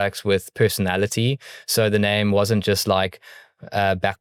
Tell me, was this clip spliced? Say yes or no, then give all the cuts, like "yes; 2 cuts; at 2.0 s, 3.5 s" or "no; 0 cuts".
no; 0 cuts